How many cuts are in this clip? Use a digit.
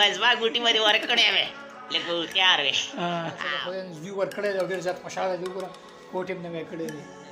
1